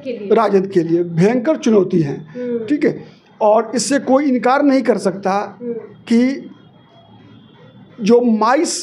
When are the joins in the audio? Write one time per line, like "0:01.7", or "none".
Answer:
none